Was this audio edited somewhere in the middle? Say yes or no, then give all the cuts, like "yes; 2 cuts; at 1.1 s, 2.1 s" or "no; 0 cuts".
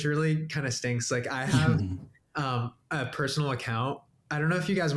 no; 0 cuts